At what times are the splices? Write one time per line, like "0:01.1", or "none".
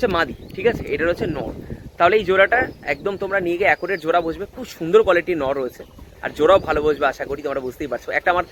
none